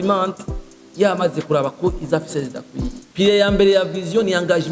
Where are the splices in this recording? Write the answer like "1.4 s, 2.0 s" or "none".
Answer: 3.0 s